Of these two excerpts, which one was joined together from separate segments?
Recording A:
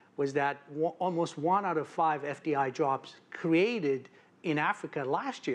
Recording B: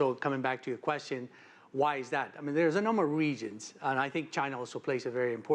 B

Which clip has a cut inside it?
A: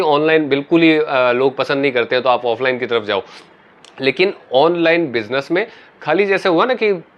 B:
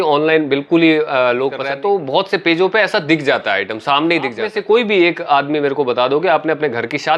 B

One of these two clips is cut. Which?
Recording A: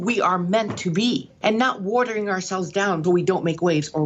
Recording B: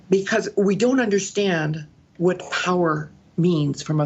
A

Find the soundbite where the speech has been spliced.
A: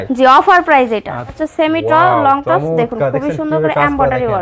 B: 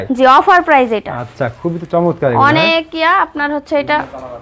A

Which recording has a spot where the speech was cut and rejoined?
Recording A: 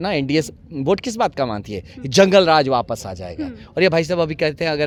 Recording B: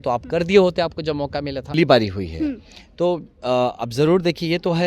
B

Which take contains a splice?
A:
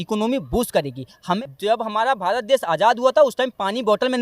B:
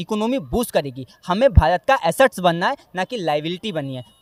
A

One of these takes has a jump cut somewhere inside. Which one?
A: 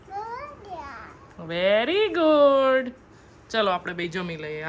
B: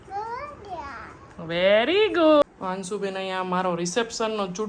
B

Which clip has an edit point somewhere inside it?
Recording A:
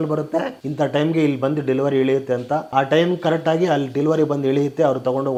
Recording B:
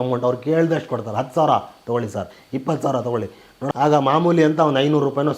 B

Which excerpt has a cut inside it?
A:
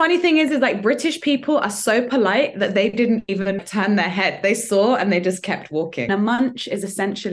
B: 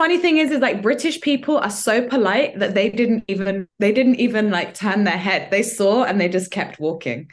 A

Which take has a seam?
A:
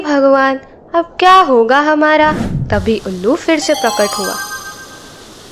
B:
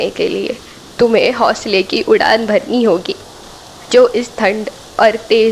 A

